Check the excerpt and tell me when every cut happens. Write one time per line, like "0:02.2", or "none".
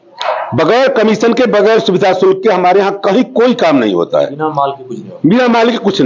none

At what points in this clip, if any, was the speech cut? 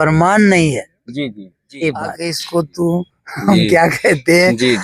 0:02.3

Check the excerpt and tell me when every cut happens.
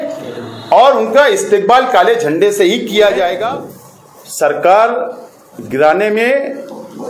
0:03.4

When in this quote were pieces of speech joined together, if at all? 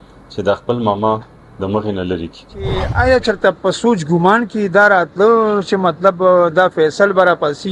0:02.9

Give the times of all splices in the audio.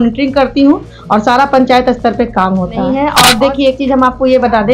0:02.9

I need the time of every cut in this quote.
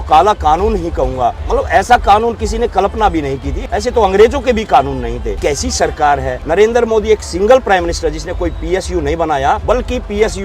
0:01.4
0:03.5
0:05.3
0:06.4
0:09.6

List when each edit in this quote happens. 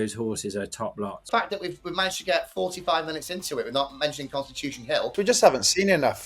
0:01.3
0:05.1

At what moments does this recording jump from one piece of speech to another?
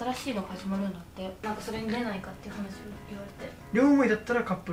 0:01.4
0:03.7

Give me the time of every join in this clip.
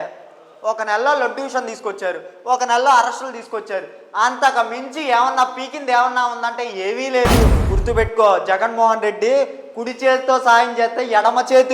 0:07.7

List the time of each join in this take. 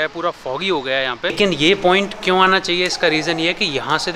0:01.3

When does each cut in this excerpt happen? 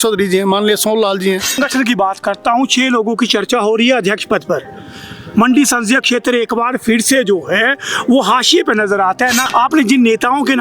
0:01.6
0:09.4

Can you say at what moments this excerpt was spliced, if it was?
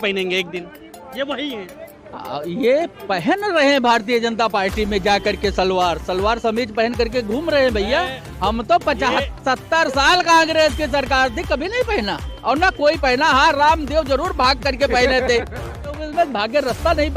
0:15.8

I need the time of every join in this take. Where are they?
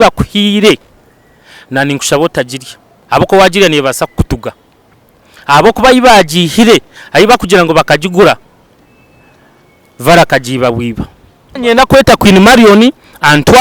0:11.6

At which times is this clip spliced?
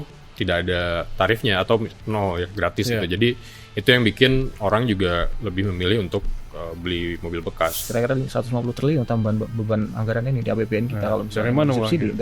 0:07.8

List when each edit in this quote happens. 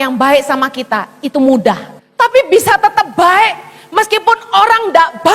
0:01.9

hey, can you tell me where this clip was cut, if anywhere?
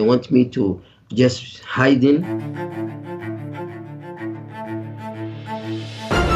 0:02.4

